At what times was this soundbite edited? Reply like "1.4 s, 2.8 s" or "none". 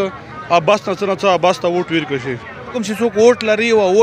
2.8 s